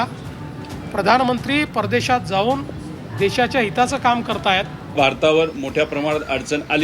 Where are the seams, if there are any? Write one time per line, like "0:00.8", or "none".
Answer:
0:04.9